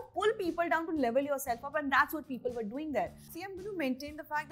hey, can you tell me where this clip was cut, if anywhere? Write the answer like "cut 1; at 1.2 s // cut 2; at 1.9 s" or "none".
cut 1; at 3.3 s